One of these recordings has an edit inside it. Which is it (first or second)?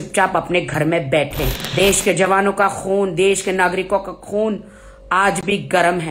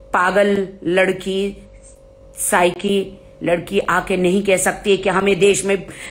first